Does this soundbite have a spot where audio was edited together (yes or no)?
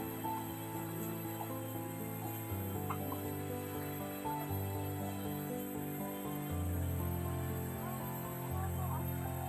no